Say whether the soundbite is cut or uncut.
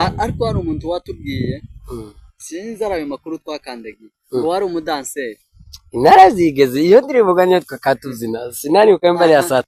uncut